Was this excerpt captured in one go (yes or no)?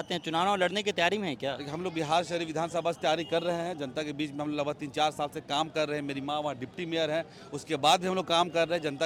yes